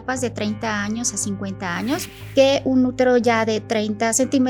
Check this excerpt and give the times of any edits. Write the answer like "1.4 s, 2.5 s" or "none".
2.1 s